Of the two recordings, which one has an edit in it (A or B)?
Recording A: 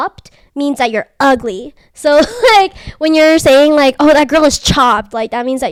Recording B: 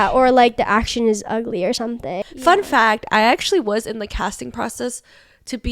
B